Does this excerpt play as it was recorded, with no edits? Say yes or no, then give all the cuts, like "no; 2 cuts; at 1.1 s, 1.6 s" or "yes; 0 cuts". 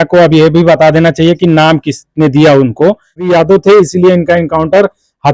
no; 1 cut; at 3.2 s